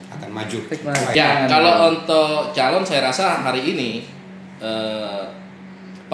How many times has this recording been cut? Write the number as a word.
one